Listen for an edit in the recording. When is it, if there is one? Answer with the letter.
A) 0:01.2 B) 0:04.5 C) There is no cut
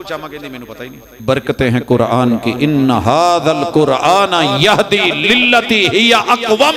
A